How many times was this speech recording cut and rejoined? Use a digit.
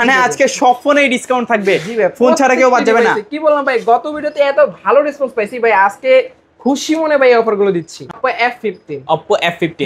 1